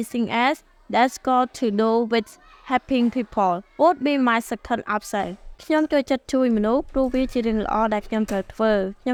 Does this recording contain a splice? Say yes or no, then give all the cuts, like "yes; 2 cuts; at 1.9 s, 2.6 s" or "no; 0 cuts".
no; 0 cuts